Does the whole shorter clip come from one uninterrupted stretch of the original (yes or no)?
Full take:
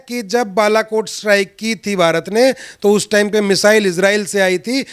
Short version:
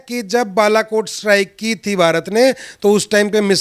yes